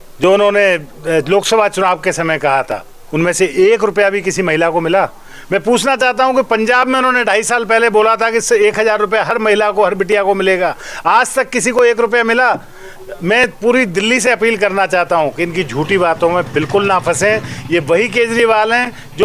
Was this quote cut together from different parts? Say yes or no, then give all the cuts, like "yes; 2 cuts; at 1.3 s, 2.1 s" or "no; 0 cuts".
no; 0 cuts